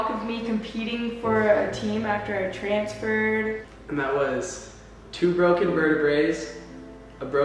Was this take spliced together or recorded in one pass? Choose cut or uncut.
cut